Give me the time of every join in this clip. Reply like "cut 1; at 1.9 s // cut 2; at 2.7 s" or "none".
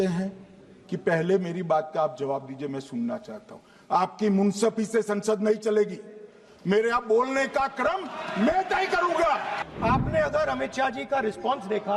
cut 1; at 9.6 s